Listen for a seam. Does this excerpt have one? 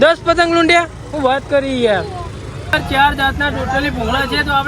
yes; 1 cut; at 2.7 s

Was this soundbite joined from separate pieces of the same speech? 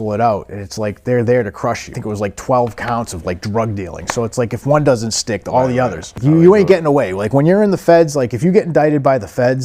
yes; 1 cut; at 6.2 s

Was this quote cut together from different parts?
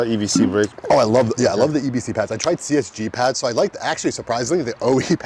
no; 0 cuts

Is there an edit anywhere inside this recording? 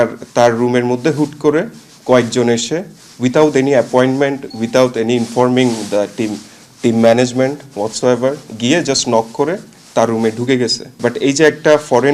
yes; 1 cut; at 10.8 s

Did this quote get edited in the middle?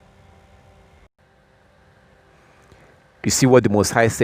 yes; 1 cut; at 1.1 s

